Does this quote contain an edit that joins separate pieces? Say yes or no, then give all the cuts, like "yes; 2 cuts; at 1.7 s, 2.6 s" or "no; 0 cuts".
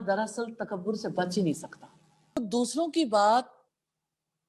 yes; 1 cut; at 2.4 s